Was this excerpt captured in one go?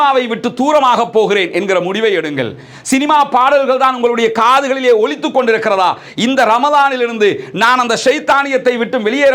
yes; 0 cuts

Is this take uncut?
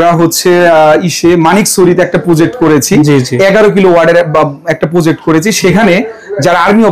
yes; 0 cuts

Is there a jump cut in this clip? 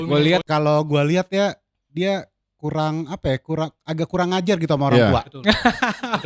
no; 0 cuts

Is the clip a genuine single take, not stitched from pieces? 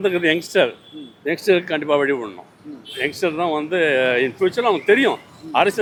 yes; 0 cuts

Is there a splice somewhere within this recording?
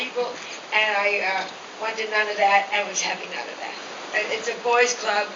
yes; 1 cut; at 3.9 s

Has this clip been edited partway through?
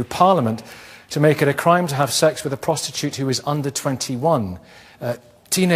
no; 0 cuts

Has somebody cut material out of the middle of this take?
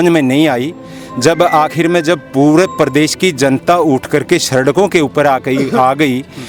no; 0 cuts

